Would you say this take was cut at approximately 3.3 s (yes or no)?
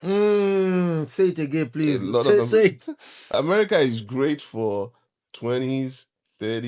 yes